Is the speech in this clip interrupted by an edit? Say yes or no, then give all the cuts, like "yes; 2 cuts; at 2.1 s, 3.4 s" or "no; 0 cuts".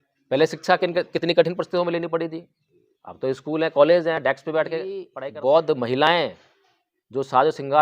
yes; 1 cut; at 5.1 s